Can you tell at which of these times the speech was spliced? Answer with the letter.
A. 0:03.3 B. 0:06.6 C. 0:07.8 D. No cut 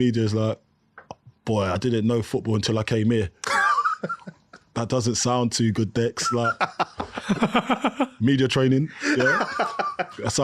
D